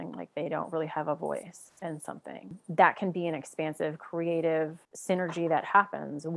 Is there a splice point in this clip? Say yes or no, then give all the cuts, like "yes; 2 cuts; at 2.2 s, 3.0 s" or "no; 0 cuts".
yes; 2 cuts; at 2.6 s, 4.9 s